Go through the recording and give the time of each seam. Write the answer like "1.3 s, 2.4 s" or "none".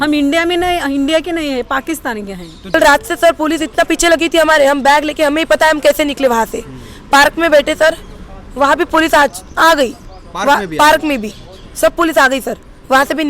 2.7 s